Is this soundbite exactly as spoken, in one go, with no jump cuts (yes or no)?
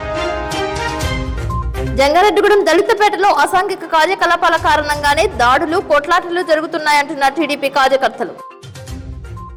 yes